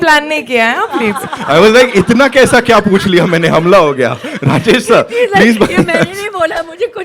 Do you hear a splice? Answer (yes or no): no